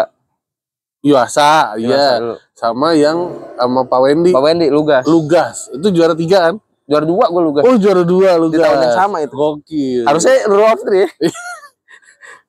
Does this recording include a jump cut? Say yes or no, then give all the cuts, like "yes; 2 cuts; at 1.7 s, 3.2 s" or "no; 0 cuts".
no; 0 cuts